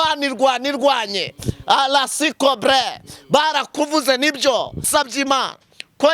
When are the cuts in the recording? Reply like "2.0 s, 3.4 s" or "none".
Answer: 4.9 s